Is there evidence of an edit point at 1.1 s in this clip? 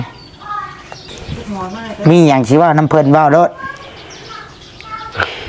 yes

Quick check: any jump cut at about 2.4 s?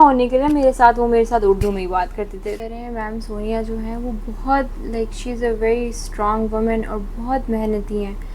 yes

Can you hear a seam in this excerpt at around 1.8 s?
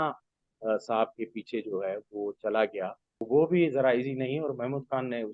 no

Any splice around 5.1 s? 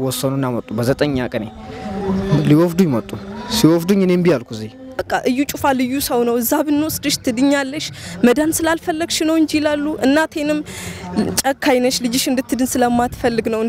yes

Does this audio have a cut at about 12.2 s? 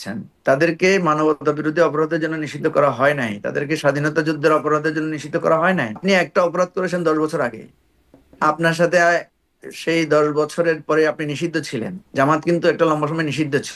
no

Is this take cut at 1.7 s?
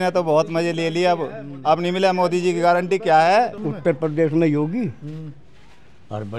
no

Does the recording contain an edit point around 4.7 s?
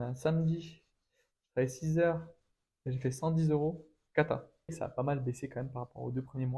yes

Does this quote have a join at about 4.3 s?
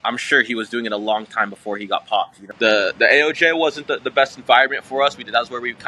no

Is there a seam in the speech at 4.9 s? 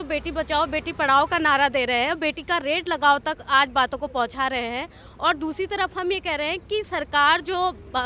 no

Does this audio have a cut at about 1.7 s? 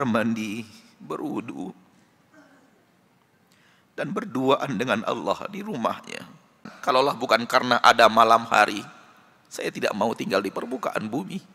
no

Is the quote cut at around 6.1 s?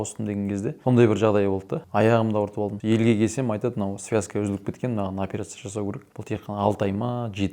yes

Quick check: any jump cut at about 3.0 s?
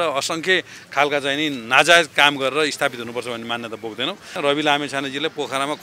no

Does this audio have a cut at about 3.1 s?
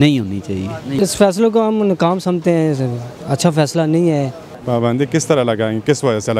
no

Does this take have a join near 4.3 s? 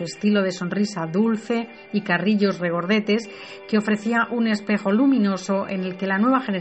no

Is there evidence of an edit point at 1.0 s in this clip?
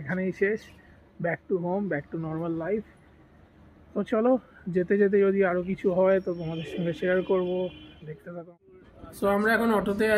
no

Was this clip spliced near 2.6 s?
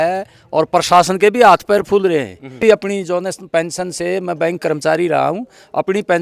yes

